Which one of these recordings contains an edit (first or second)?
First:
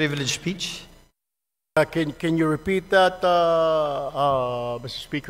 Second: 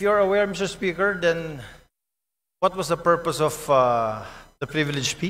first